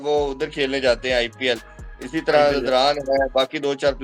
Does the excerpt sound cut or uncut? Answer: uncut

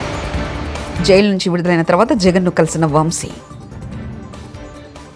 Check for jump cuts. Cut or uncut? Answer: uncut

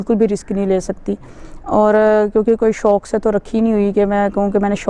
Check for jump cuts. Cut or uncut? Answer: uncut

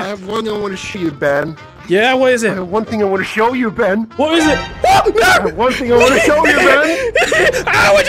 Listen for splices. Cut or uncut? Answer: uncut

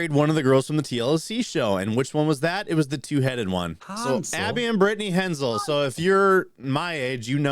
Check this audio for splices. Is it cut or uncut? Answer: cut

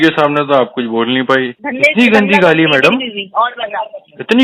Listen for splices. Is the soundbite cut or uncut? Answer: cut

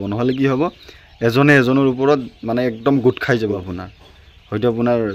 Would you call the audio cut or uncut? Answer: cut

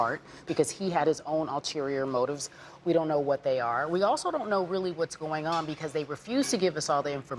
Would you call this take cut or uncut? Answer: uncut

